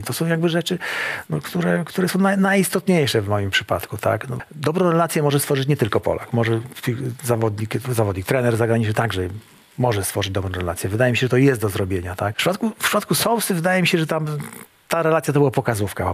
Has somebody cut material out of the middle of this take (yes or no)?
yes